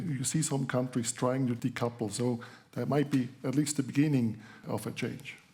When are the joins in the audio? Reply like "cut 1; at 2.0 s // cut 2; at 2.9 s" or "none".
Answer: cut 1; at 1.6 s // cut 2; at 4.6 s